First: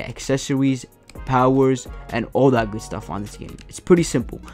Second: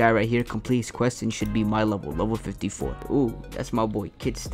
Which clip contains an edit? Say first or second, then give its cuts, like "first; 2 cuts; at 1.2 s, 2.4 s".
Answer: second; 1 cut; at 3.0 s